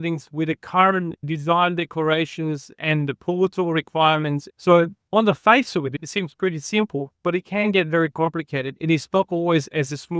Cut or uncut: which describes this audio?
cut